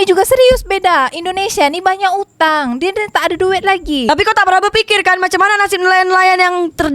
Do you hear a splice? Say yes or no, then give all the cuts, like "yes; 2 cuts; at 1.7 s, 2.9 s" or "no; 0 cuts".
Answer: yes; 1 cut; at 4.1 s